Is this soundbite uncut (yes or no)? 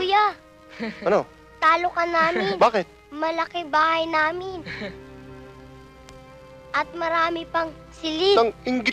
yes